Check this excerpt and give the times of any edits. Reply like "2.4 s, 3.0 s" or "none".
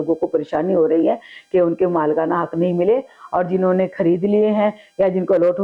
none